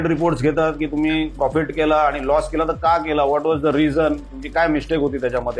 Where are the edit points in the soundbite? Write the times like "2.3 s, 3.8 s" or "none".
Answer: none